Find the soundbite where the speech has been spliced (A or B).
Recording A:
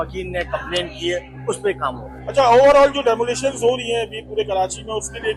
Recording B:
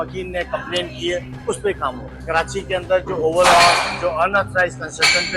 B